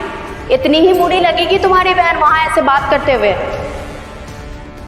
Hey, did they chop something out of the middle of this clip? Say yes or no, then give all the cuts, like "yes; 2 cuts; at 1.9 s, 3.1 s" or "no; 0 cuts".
yes; 1 cut; at 3.4 s